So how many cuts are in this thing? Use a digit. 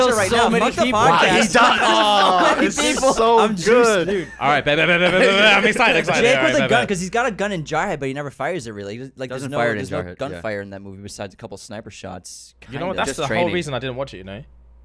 0